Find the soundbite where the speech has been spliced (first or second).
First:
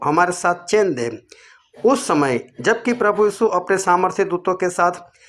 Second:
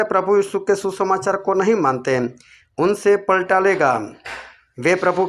second